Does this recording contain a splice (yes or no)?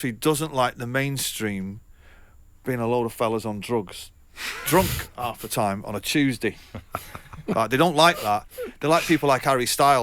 no